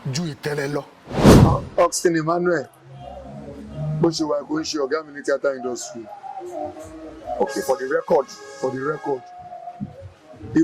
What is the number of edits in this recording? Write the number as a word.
two